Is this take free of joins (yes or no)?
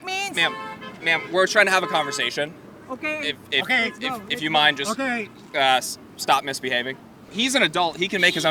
yes